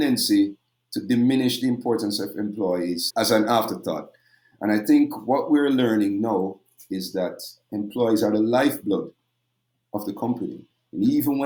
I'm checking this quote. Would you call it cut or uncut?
uncut